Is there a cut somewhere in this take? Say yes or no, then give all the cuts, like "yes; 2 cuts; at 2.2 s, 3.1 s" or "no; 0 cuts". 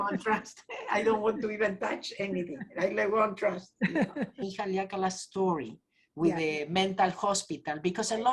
yes; 1 cut; at 4.5 s